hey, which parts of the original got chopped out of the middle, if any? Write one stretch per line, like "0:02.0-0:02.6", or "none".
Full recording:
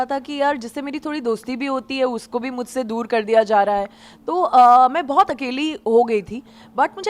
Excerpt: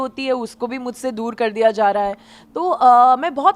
none